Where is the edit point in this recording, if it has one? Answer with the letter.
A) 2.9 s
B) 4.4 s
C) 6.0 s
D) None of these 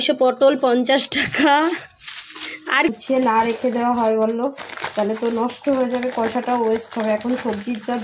A